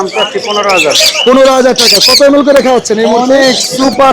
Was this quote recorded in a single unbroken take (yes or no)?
no